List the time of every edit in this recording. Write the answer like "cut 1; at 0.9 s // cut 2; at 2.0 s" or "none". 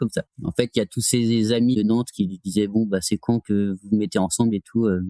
none